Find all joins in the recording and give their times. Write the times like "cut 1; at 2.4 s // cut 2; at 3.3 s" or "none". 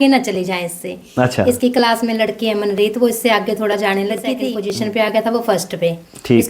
cut 1; at 4.5 s